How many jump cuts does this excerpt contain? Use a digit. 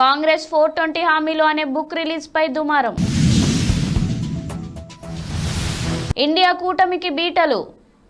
0